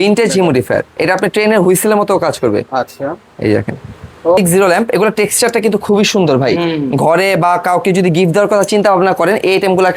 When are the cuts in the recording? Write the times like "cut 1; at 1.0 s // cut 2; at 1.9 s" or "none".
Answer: cut 1; at 4.4 s